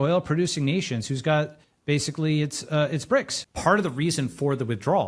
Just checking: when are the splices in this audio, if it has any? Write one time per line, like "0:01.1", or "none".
0:01.7
0:03.4